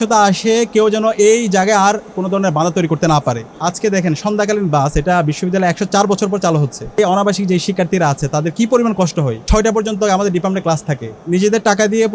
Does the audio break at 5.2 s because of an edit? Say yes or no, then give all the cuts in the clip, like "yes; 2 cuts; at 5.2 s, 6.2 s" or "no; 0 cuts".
no; 4 cuts; at 3.5 s, 7.0 s, 9.4 s, 11.2 s